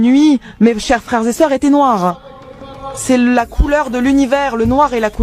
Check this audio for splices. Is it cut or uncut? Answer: uncut